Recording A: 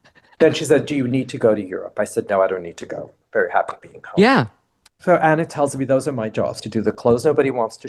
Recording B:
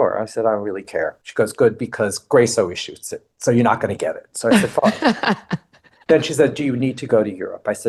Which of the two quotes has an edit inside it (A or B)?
A